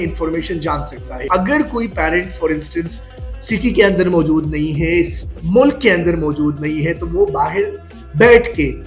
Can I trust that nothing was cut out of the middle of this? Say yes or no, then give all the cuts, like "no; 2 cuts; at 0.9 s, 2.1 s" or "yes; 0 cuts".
no; 1 cut; at 1.2 s